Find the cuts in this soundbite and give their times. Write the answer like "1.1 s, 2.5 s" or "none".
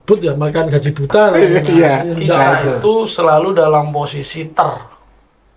2.7 s